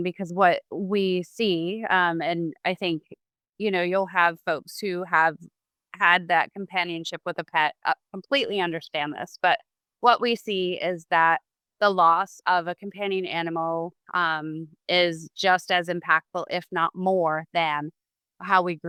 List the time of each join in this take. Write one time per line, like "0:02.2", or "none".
none

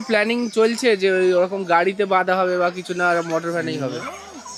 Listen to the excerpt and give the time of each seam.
none

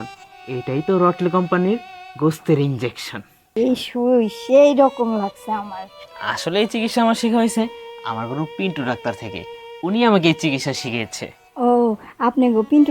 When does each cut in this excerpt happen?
0:03.6

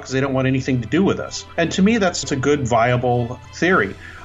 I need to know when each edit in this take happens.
0:01.4
0:02.2
0:03.4

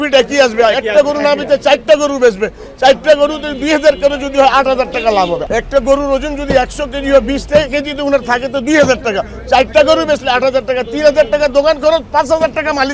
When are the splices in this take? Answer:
0:05.4

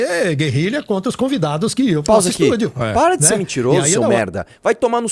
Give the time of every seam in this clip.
none

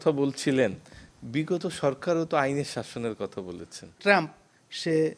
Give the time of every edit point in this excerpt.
0:03.9

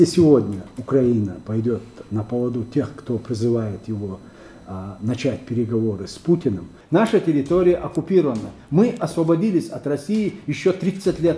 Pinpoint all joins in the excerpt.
0:06.7

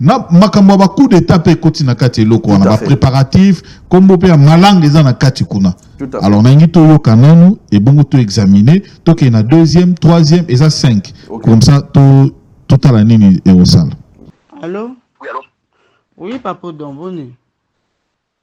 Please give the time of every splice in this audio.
none

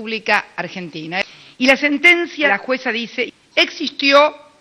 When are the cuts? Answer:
0:01.2
0:02.5

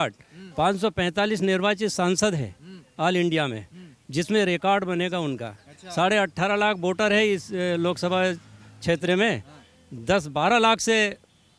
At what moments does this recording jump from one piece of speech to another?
none

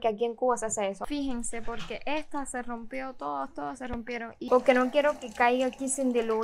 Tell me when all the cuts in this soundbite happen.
0:01.0
0:04.4

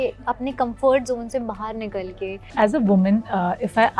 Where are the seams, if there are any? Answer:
0:02.5

